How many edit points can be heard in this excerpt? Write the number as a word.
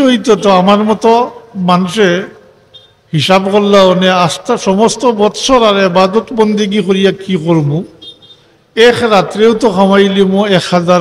zero